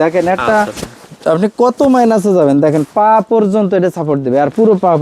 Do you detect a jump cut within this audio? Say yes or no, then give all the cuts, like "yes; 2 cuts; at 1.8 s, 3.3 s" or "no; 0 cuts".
no; 0 cuts